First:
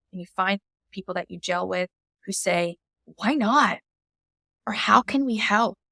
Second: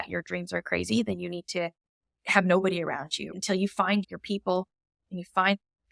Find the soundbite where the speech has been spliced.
second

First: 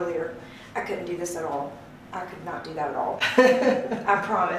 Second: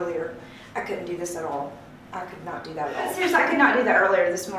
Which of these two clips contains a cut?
second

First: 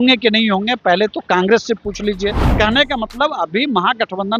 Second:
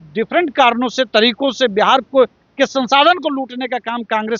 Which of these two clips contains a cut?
first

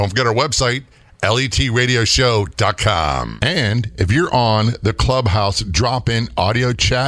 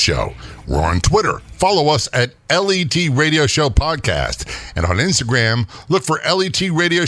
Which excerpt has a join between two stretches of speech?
first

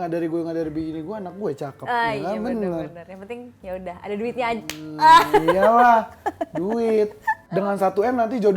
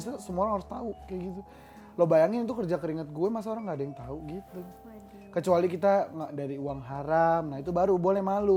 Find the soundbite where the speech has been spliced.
first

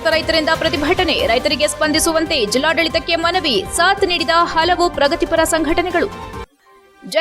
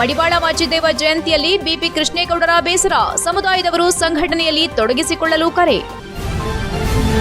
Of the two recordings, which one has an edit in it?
second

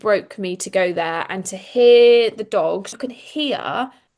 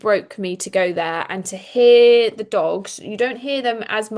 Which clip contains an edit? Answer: first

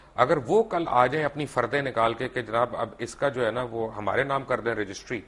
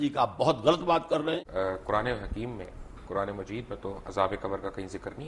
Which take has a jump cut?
second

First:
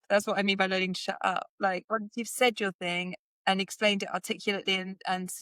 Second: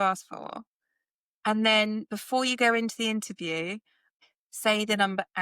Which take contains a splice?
second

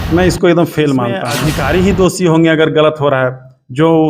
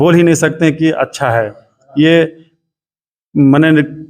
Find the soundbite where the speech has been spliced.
first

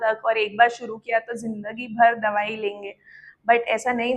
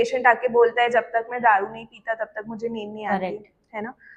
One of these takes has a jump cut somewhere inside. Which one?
second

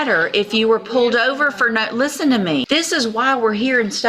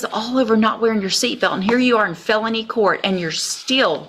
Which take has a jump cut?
first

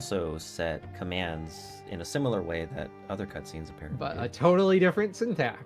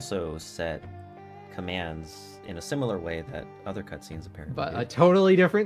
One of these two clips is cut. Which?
first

